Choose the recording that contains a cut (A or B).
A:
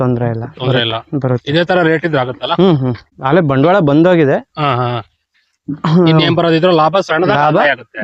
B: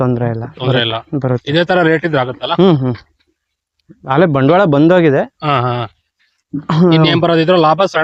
A